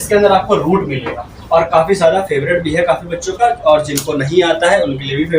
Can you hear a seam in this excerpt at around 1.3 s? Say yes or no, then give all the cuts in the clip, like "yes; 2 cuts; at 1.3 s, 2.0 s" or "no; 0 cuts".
yes; 1 cut; at 1.3 s